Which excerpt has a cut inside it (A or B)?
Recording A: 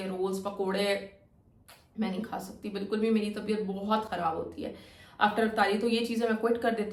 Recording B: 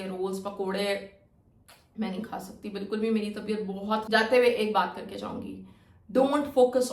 B